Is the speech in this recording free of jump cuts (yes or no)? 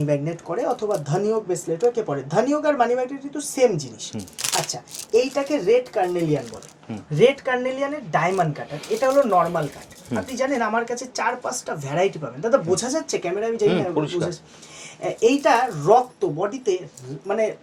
yes